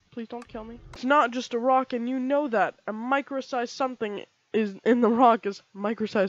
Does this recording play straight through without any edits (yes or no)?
no